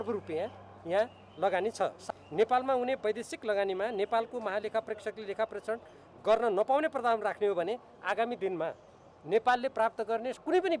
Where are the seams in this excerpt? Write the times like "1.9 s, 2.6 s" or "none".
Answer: 2.0 s